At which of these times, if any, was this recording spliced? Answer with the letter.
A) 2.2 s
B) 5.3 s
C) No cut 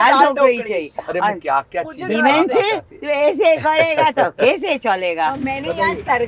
B